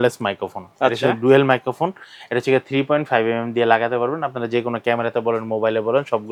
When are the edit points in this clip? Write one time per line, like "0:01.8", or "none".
none